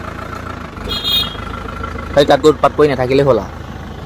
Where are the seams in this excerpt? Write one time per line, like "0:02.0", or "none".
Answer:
none